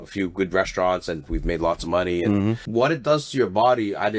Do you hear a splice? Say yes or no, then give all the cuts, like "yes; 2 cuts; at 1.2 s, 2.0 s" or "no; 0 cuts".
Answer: yes; 1 cut; at 2.6 s